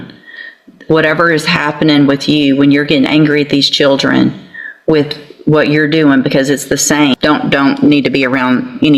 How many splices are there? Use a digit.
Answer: 1